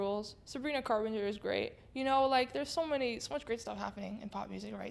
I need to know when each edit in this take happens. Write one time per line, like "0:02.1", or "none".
none